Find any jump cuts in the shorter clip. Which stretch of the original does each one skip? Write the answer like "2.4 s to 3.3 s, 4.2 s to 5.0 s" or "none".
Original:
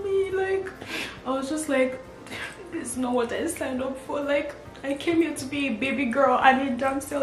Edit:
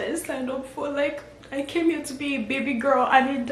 none